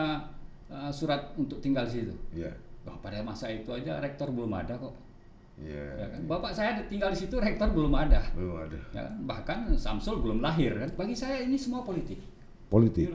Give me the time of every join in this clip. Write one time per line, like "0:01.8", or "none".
0:10.9